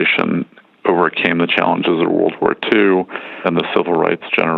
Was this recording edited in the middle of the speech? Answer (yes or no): yes